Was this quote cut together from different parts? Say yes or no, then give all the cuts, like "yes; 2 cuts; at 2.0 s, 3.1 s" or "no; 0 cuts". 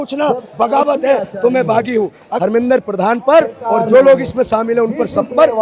yes; 1 cut; at 2.2 s